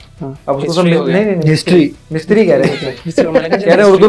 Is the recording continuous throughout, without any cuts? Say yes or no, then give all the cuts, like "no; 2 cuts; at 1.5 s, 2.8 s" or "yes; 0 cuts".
yes; 0 cuts